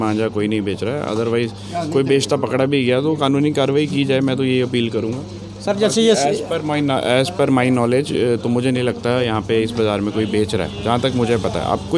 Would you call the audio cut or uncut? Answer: uncut